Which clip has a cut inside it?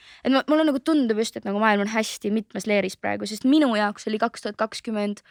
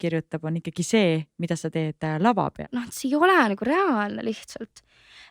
second; 1 cut; at 2.7 s

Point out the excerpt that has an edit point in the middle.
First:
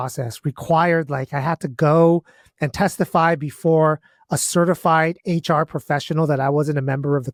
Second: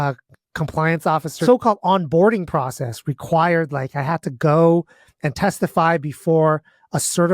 second; 1 cut; at 1.4 s

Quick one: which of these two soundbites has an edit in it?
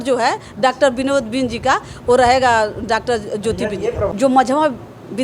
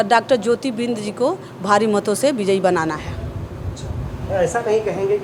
first; 1 cut; at 4.1 s

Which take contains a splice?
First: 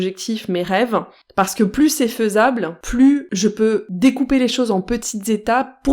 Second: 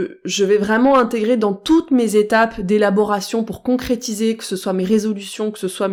first; 2 cuts; at 2.8 s, 3.8 s

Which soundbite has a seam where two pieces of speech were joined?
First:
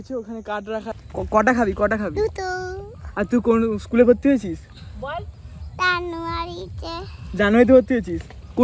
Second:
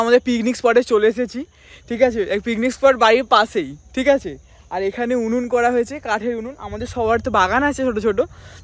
first; 1 cut; at 0.9 s

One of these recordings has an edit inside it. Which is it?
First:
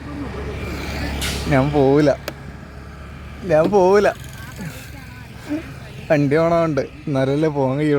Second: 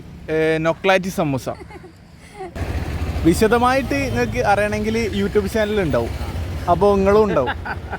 second; 1 cut; at 2.6 s

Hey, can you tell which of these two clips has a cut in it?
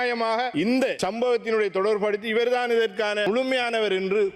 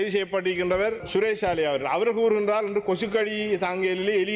first; 1 cut; at 3.2 s

